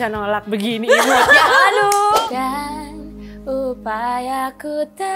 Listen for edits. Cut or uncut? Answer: cut